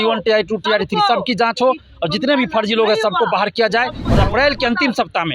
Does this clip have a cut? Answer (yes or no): yes